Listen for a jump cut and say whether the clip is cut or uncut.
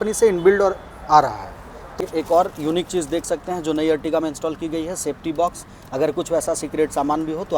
cut